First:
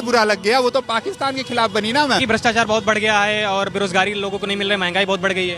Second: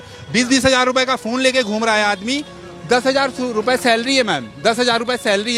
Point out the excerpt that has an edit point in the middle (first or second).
first